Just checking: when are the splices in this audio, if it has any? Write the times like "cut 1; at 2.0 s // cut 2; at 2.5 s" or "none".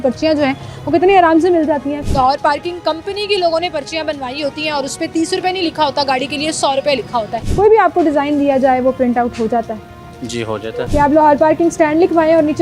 cut 1; at 2.0 s // cut 2; at 7.4 s // cut 3; at 10.6 s